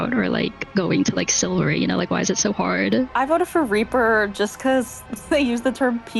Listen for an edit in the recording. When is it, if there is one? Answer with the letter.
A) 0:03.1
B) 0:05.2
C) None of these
A